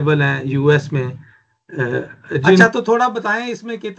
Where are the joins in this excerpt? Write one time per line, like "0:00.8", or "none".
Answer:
0:02.6

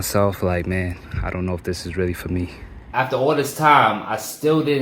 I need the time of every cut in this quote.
0:02.8

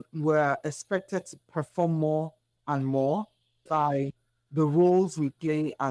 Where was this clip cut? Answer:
0:03.6

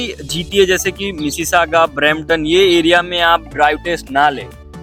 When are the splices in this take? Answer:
none

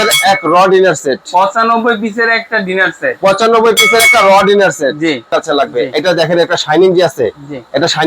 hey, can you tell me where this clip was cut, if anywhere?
0:05.3

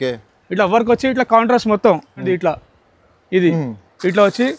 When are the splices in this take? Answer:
0:02.2

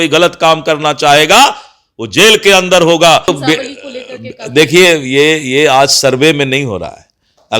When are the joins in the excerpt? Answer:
0:03.4

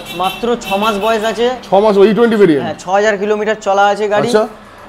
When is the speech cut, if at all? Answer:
none

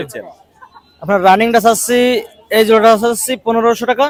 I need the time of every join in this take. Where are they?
none

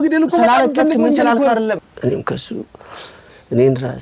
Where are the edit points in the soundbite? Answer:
0:01.8

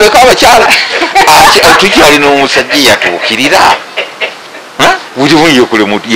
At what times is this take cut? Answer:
0:05.1

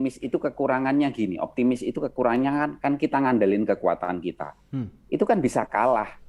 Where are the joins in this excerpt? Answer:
none

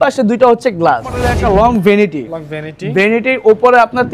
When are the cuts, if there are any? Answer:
0:01.3

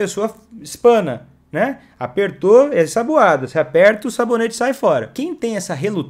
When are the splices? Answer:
0:05.1

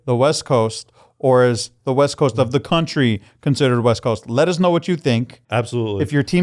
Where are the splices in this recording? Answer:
0:05.4

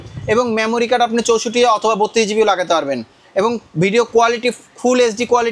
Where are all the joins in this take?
none

